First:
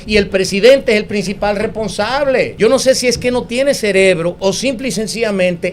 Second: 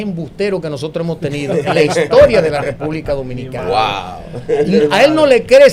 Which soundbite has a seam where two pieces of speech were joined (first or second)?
first